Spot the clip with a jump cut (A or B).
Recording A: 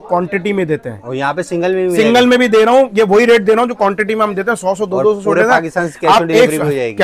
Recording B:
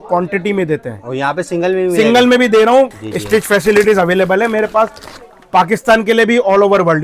B